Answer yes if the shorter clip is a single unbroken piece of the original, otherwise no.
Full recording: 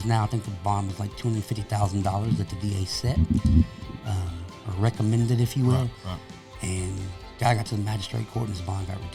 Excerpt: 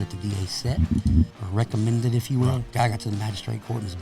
no